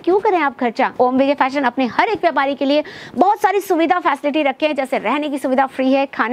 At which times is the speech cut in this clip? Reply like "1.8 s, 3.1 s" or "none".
0.9 s